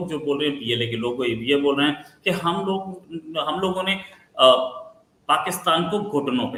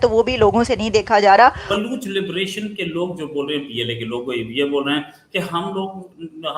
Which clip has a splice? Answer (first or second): second